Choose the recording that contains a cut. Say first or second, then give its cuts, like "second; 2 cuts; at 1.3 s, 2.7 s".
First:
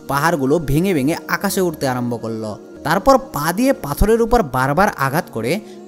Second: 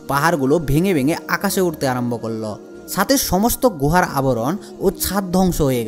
first; 1 cut; at 2.7 s